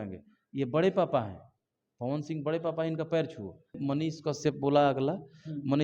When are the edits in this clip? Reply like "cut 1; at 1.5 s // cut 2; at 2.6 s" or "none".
cut 1; at 3.8 s